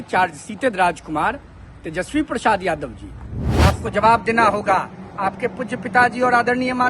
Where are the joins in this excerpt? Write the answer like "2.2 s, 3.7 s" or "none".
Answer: 3.4 s